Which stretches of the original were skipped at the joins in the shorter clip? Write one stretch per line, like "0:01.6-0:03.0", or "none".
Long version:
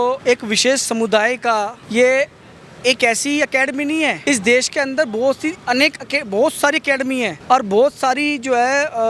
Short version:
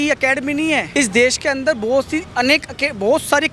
none